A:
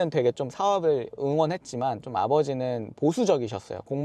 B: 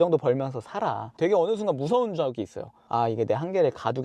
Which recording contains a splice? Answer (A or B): B